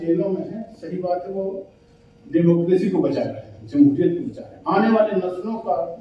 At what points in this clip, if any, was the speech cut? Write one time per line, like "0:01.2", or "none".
none

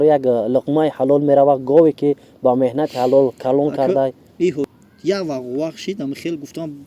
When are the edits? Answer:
0:04.7

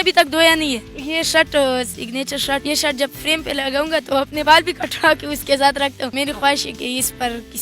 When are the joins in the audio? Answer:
0:01.0
0:02.6
0:04.4
0:06.1

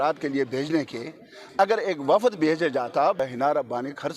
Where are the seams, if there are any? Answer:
0:03.2

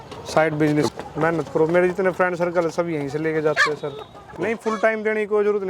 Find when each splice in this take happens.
0:00.9
0:04.4

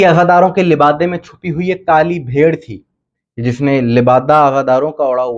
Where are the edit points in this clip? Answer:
none

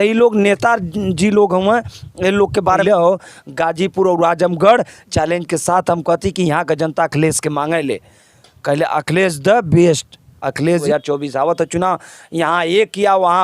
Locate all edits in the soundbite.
0:02.8
0:10.8

